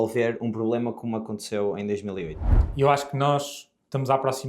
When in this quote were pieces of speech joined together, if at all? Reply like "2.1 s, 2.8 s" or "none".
2.4 s